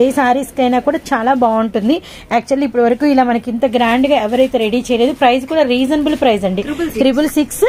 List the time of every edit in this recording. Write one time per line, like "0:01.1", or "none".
none